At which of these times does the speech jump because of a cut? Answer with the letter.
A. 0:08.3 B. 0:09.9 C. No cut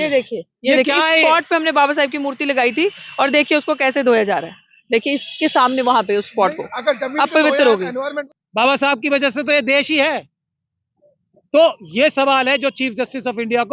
A